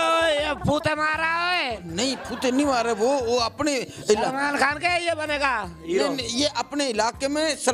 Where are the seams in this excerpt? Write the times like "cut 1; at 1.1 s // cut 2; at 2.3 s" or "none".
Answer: none